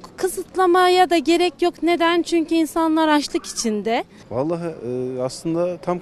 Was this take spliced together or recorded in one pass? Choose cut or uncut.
cut